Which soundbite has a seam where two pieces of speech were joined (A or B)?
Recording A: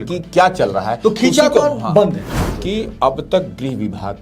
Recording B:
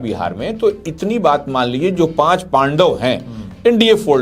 A